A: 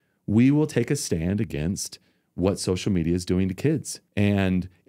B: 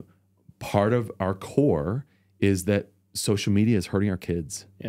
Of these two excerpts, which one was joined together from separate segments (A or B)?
A